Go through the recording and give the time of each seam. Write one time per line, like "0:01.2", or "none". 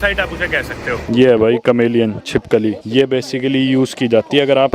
0:01.0
0:02.8